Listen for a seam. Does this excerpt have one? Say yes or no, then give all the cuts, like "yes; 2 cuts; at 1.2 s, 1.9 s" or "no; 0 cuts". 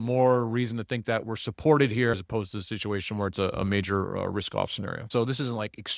yes; 2 cuts; at 2.1 s, 5.1 s